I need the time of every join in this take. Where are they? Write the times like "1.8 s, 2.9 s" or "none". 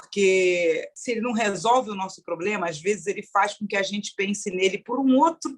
0.9 s